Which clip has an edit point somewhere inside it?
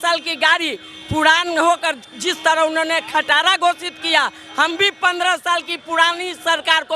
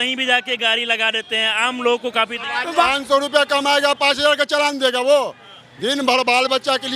second; 1 cut; at 2.9 s

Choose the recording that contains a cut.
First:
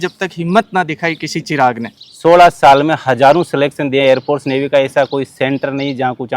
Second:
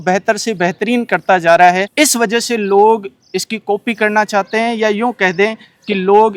first; 1 cut; at 1.9 s

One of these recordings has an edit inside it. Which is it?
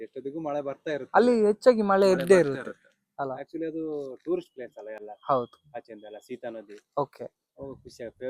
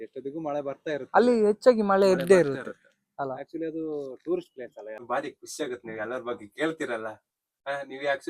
second; 1 cut; at 5.0 s

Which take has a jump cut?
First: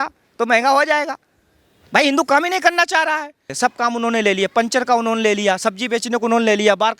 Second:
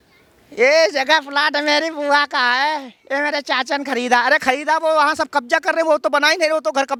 first; 1 cut; at 3.5 s

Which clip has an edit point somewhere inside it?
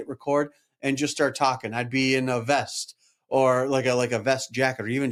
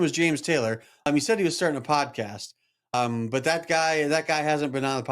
second; 2 cuts; at 1.1 s, 2.9 s

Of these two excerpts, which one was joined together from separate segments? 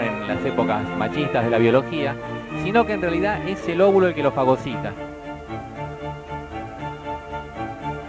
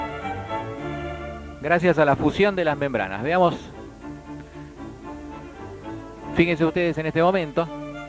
first; 1 cut; at 6.2 s

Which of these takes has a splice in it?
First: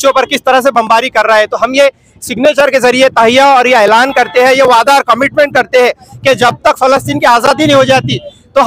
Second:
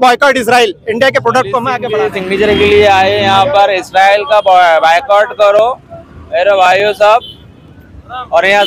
second; 1 cut; at 1.8 s

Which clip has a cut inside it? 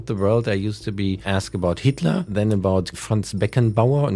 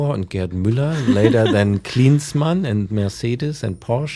first; 3 cuts; at 1.2 s, 2.3 s, 3.0 s

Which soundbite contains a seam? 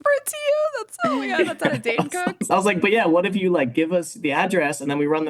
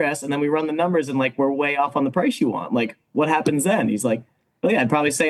first; 1 cut; at 2.4 s

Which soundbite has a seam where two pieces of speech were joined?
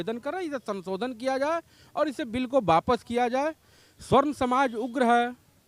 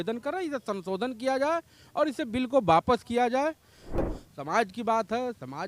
second; 1 cut; at 4.0 s

